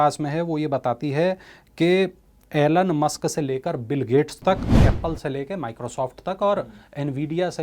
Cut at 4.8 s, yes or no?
yes